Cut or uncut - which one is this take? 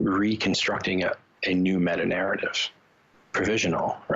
cut